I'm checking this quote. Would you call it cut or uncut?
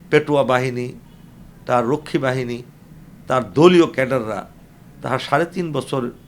uncut